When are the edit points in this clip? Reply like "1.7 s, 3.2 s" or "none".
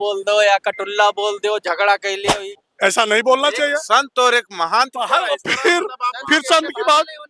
2.2 s